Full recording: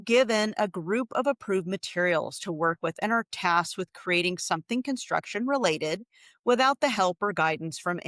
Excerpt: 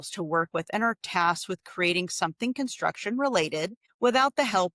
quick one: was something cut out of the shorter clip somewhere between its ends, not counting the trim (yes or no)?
yes